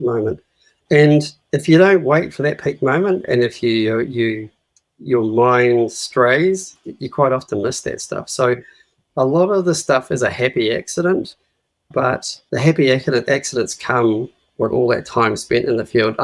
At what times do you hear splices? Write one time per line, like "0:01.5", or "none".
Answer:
0:01.4
0:12.3